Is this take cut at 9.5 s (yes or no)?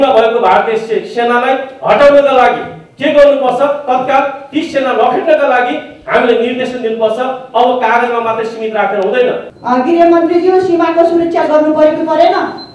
yes